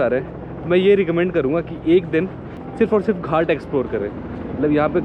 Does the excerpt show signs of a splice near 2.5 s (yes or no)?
yes